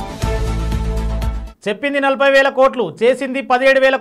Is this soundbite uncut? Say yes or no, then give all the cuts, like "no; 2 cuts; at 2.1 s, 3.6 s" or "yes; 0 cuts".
no; 1 cut; at 1.4 s